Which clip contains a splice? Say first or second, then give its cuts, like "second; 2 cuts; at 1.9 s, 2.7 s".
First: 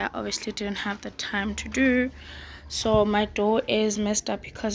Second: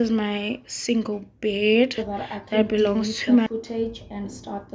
second; 1 cut; at 3.5 s